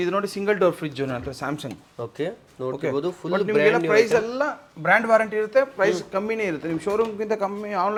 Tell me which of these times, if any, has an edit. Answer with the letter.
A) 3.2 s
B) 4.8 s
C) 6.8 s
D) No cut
D